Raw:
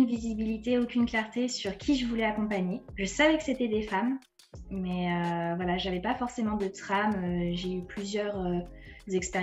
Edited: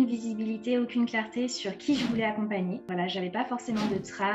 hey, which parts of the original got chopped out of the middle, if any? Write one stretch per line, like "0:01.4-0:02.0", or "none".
0:02.9-0:05.6

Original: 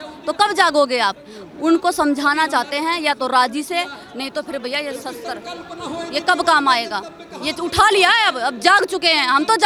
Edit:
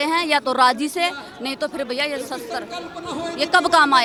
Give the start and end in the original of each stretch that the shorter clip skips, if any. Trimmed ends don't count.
none

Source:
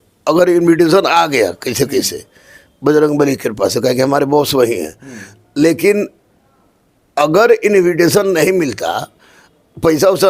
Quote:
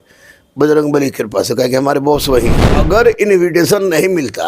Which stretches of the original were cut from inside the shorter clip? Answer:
0:04.9-0:07.1

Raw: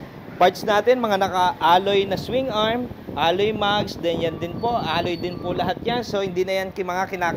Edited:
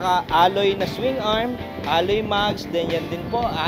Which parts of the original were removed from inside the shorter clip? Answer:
none

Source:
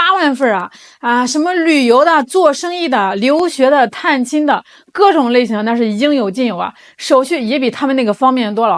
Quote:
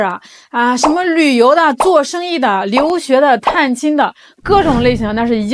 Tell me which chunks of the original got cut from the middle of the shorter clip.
none

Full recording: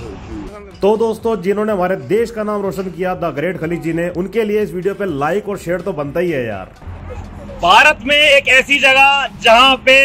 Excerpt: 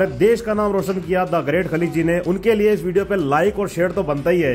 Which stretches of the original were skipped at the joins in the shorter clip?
none

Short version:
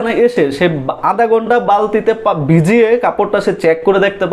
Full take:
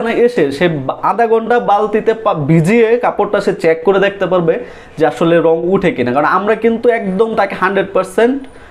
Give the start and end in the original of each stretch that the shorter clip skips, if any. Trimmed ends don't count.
none

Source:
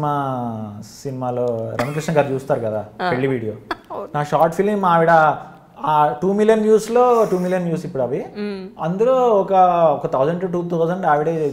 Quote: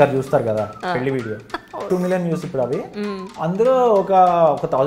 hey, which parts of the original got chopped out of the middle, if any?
0:04.0-0:07.3

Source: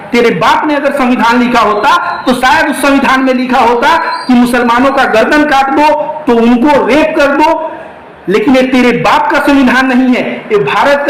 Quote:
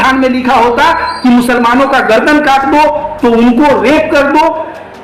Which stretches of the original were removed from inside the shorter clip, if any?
none

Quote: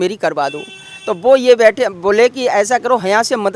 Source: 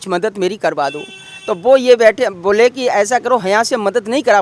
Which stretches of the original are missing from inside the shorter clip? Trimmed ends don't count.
none

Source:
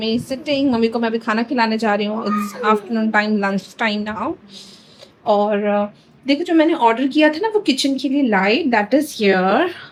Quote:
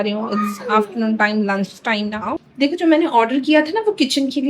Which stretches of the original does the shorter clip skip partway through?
0:04.3-0:06.1

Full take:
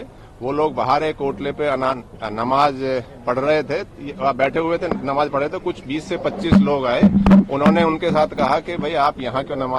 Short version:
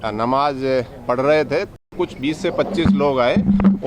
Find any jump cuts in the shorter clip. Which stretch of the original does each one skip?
0:04.1-0:05.6

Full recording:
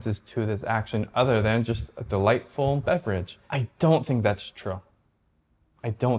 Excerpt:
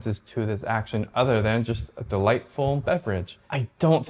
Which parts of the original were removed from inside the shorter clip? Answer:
none

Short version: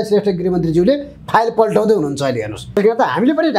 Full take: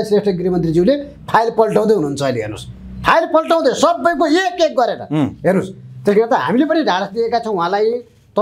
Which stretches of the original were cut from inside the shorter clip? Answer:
0:02.6-0:05.9

